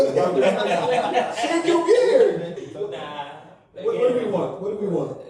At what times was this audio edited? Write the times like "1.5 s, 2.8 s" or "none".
2.6 s